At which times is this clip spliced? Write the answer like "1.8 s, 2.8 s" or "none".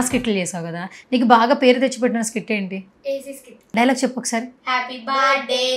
3.5 s